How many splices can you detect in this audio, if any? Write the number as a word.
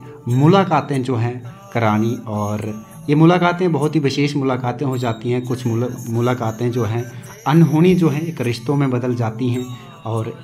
zero